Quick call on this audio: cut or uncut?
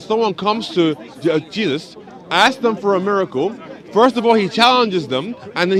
uncut